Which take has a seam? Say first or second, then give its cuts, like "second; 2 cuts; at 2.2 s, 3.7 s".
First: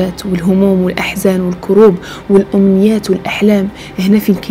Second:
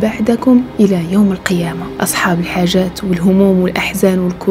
second; 1 cut; at 1.8 s